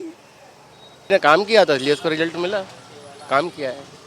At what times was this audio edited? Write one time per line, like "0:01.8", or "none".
0:01.1